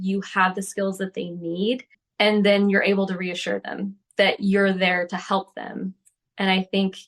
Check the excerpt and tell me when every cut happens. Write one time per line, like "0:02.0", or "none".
0:02.0